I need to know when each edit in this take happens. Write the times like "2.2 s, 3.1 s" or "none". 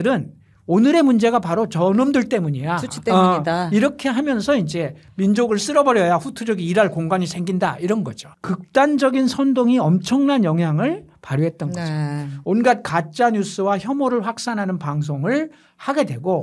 8.3 s